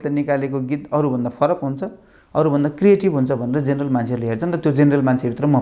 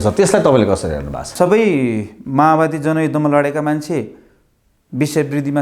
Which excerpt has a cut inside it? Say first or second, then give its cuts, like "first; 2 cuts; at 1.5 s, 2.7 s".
second; 1 cut; at 1.3 s